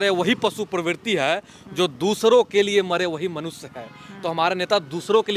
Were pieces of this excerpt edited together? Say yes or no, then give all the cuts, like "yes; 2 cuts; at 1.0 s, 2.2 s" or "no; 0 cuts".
no; 0 cuts